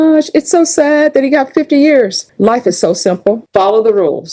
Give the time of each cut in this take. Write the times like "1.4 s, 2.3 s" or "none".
2.2 s, 3.4 s

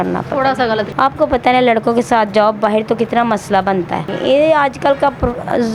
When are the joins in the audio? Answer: 0.9 s, 4.1 s

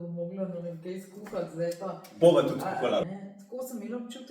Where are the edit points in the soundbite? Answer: 3.1 s

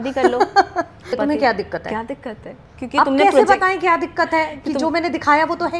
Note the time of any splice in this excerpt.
1.2 s

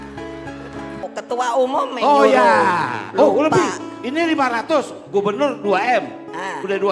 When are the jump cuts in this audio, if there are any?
1.0 s

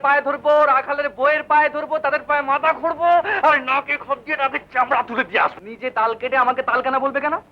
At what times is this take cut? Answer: 5.7 s

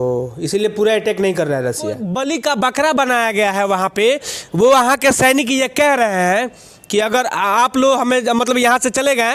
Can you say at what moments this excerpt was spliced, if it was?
2.0 s

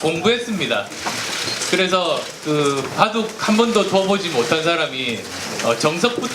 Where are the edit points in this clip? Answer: none

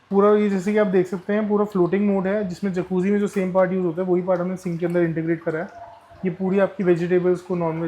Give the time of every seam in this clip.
none

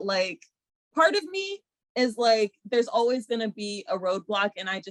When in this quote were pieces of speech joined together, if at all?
none

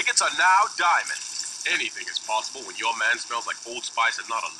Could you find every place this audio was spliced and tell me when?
3.1 s

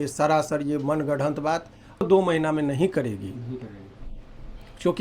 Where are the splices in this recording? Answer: 2.0 s

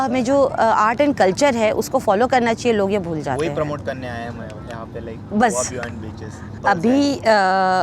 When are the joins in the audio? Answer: 6.6 s

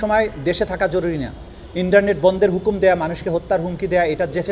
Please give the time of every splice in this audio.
none

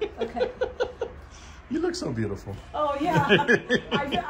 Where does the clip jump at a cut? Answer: none

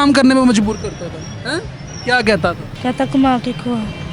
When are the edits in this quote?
2.7 s

